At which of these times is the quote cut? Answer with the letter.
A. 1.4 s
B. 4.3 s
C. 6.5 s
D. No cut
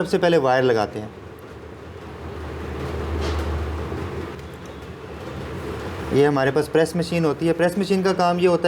B